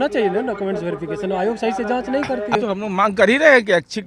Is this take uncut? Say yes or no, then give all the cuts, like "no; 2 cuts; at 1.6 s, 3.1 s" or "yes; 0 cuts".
no; 1 cut; at 2.6 s